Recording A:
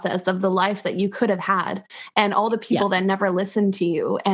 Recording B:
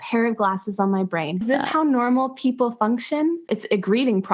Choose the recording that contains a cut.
B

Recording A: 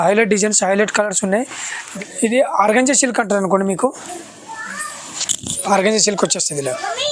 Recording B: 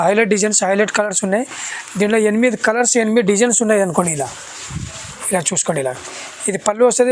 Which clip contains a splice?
A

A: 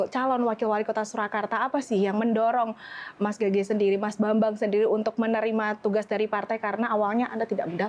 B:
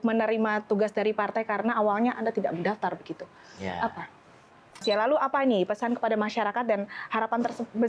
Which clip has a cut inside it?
B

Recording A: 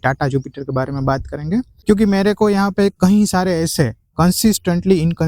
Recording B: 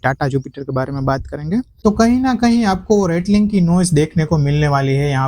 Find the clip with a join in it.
B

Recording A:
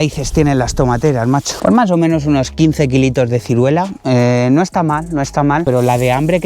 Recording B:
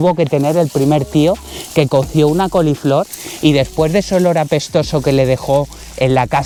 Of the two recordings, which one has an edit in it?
A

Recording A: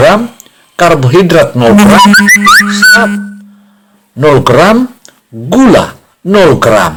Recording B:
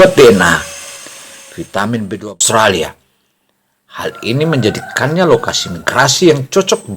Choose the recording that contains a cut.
B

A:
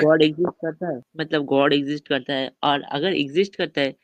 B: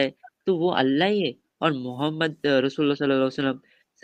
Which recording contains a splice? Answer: A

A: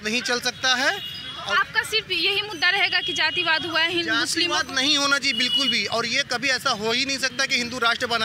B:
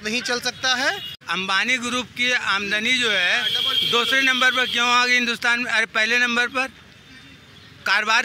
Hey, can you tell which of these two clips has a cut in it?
B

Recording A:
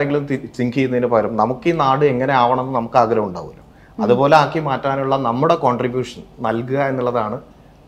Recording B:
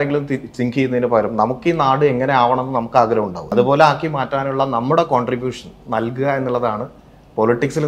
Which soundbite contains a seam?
B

